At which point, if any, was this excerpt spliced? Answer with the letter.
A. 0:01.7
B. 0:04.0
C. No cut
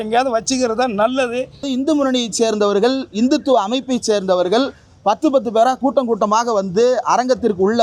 A